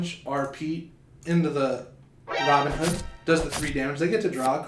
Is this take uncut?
yes; 0 cuts

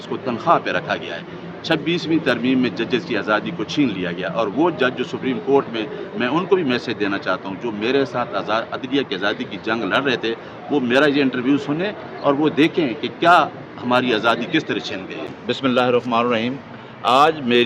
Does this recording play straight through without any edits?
no; 1 cut; at 15.4 s

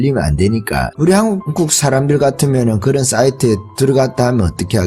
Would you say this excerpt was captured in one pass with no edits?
no; 2 cuts; at 0.9 s, 1.5 s

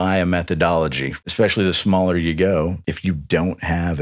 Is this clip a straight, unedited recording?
no; 2 cuts; at 1.1 s, 2.8 s

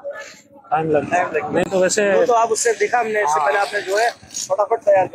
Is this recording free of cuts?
yes; 0 cuts

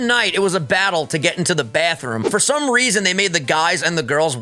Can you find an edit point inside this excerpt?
yes; 1 cut; at 2.2 s

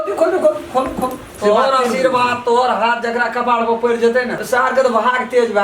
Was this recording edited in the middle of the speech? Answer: yes; 2 cuts; at 1.3 s, 4.4 s

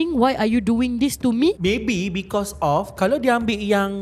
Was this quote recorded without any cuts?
no; 1 cut; at 1.6 s

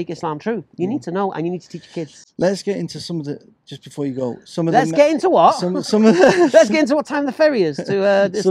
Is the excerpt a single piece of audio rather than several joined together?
yes; 0 cuts

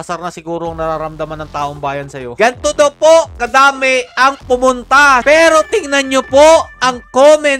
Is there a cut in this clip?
yes; 2 cuts; at 2.3 s, 5.2 s

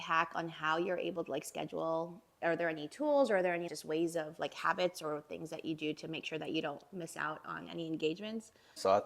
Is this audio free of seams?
no; 1 cut; at 2.4 s

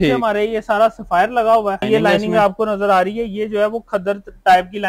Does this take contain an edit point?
yes; 1 cut; at 1.8 s

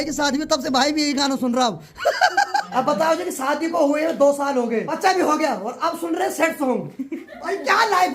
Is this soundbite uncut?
no; 2 cuts; at 2.7 s, 4.9 s

